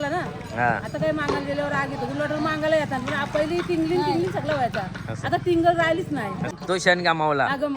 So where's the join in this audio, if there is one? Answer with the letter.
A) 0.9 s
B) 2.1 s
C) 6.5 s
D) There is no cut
C